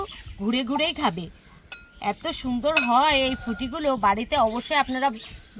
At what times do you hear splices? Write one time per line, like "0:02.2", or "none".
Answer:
none